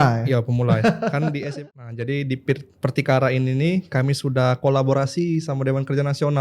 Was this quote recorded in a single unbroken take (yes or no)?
no